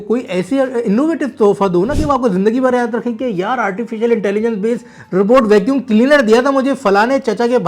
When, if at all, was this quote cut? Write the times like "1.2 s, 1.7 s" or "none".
none